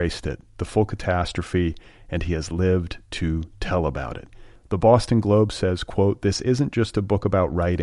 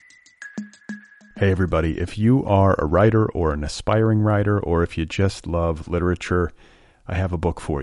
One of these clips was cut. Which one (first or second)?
second